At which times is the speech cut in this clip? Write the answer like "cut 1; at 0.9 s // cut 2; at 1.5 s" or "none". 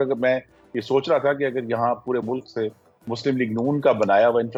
none